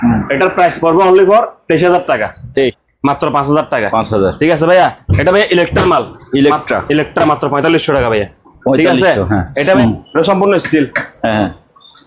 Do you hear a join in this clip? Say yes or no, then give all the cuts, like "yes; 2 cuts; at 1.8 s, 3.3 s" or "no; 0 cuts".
yes; 2 cuts; at 2.9 s, 9.6 s